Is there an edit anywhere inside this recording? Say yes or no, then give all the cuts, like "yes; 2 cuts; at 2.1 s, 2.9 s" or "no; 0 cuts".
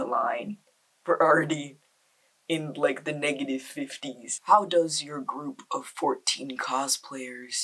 yes; 1 cut; at 4.3 s